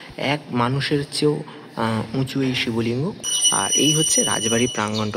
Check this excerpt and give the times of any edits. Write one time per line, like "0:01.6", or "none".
0:03.2